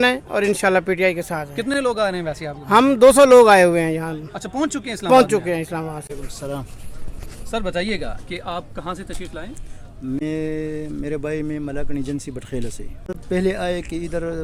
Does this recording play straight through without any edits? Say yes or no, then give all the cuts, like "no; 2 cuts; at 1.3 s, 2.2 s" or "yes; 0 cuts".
yes; 0 cuts